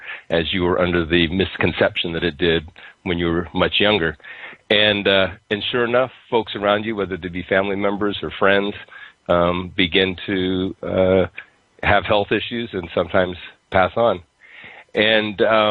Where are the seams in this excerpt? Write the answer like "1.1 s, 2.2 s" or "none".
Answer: 6.5 s